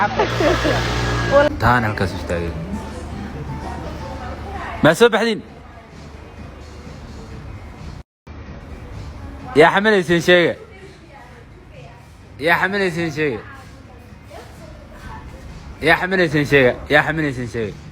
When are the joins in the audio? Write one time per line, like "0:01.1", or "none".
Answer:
0:01.4